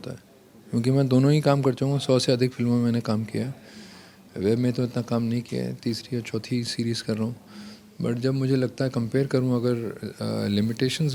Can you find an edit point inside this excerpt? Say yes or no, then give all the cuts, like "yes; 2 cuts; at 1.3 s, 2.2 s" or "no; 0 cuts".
no; 0 cuts